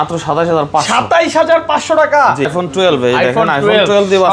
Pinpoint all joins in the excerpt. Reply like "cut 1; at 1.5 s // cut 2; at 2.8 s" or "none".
cut 1; at 2.6 s